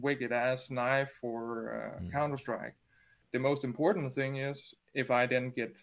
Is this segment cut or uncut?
cut